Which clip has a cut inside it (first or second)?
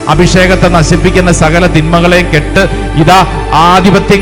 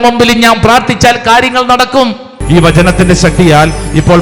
second